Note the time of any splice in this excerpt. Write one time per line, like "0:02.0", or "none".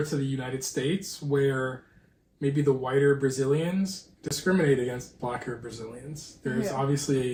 none